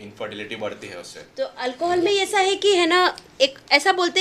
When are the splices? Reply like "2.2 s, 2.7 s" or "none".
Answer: 1.3 s